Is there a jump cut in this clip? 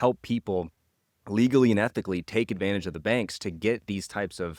no; 0 cuts

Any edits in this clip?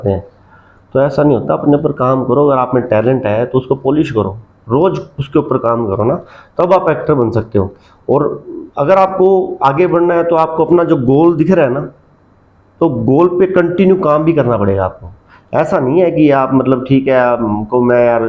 no; 0 cuts

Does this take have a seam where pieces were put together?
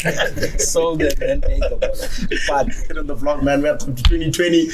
yes; 1 cut; at 3.2 s

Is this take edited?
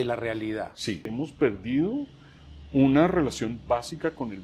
yes; 1 cut; at 1.1 s

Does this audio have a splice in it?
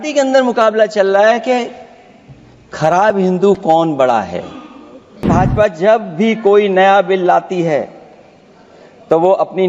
yes; 1 cut; at 5.3 s

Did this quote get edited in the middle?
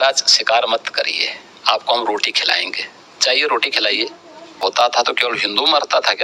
yes; 1 cut; at 4.6 s

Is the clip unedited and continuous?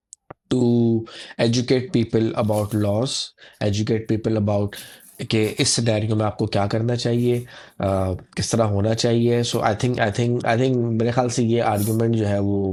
yes; 0 cuts

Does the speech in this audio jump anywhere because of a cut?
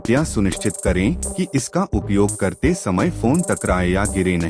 no; 0 cuts

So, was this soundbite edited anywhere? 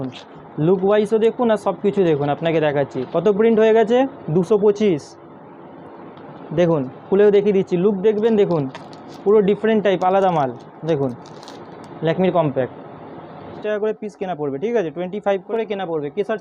yes; 2 cuts; at 13.5 s, 15.5 s

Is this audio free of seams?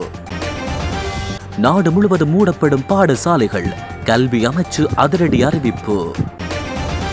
yes; 0 cuts

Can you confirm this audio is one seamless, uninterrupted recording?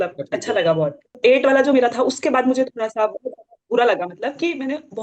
no; 1 cut; at 1.1 s

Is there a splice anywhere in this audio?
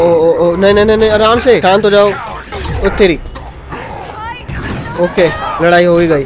yes; 2 cuts; at 1.6 s, 4.5 s

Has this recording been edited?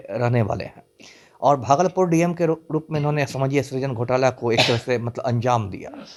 no; 0 cuts

